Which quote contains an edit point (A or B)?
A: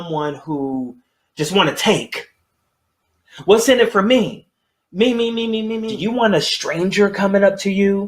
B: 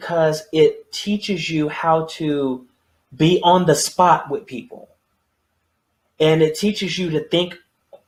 A